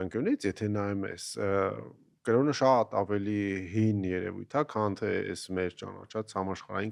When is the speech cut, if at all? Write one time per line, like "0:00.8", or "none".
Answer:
none